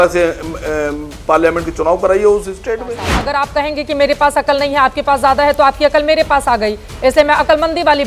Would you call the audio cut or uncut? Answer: cut